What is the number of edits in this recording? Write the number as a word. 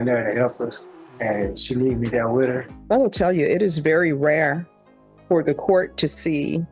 one